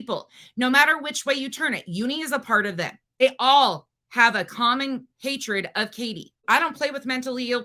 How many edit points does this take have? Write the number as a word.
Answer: two